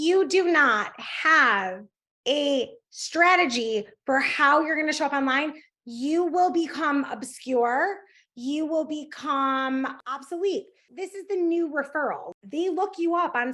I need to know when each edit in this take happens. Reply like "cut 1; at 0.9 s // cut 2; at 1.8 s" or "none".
cut 1; at 10.0 s // cut 2; at 10.9 s // cut 3; at 12.3 s